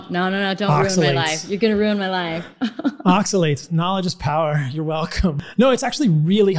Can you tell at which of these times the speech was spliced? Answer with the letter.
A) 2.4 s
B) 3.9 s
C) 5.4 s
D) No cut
C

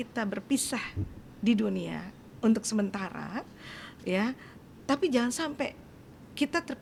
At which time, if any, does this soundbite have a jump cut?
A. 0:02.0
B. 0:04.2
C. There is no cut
C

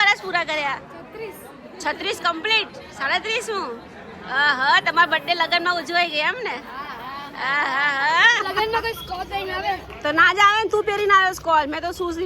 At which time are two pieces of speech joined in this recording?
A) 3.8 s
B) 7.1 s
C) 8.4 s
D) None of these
C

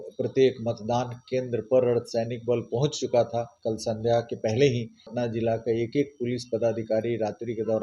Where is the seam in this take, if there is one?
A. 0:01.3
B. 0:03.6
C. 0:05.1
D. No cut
C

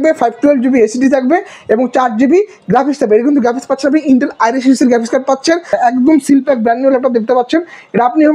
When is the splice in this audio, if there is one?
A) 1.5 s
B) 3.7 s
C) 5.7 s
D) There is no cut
C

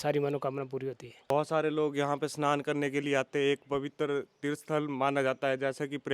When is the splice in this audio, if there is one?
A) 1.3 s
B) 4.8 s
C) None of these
A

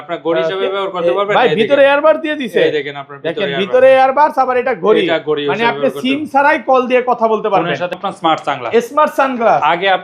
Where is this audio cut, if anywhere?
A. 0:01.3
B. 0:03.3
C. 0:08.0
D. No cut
C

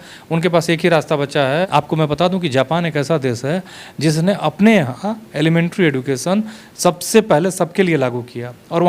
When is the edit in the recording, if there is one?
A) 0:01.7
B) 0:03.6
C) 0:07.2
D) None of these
A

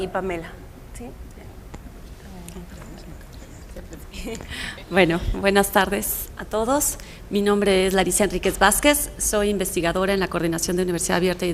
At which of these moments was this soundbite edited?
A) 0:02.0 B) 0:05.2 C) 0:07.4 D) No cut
C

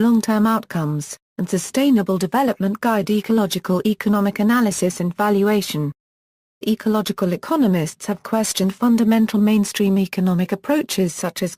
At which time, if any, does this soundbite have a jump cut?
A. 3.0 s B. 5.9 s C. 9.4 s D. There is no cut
A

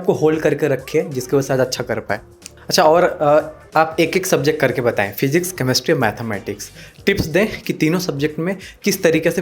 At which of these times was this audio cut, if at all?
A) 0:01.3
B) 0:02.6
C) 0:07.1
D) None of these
B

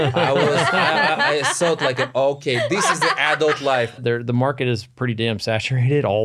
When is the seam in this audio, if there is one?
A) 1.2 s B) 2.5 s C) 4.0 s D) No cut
C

